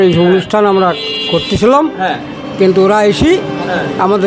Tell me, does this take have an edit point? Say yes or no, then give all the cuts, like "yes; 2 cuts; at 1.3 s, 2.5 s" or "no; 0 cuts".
no; 0 cuts